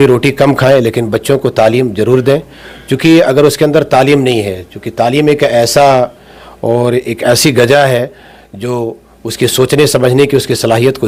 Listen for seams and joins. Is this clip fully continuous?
yes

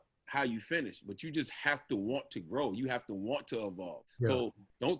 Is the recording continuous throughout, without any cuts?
no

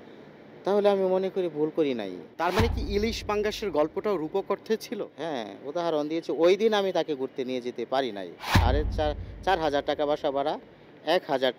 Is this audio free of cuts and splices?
no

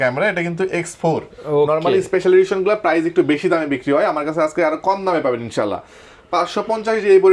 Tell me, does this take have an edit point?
no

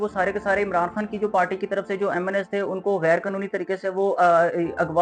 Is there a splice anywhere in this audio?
no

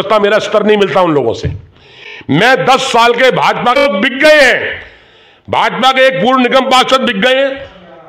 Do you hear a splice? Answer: yes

